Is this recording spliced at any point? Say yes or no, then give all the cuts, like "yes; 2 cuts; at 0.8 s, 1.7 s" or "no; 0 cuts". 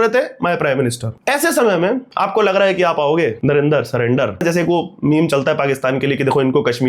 yes; 4 cuts; at 1.1 s, 2.1 s, 3.4 s, 4.4 s